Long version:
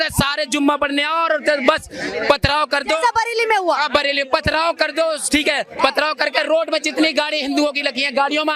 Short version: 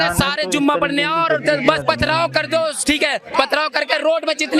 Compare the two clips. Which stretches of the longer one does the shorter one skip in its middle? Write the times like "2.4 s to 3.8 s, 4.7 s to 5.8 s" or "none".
1.8 s to 4.2 s